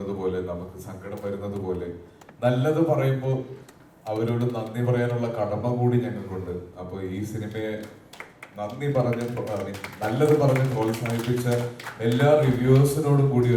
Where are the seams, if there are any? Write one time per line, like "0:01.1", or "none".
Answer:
none

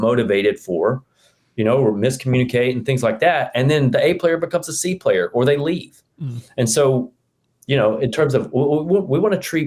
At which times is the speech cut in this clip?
none

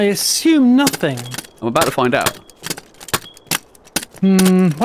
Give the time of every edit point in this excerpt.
none

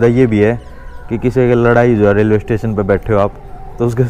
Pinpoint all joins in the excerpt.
none

